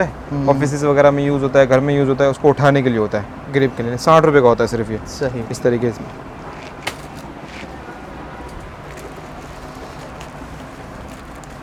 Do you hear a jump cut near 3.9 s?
no; 0 cuts

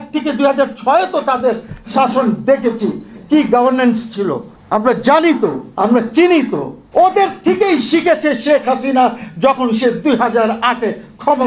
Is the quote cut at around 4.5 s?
yes; 3 cuts; at 4.5 s, 5.6 s, 6.7 s

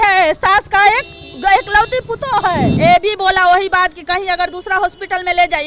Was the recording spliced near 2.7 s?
yes; 1 cut; at 2.7 s

